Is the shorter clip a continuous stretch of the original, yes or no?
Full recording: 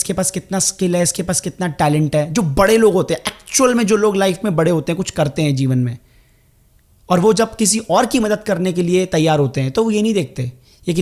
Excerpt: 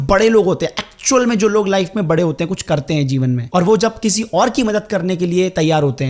no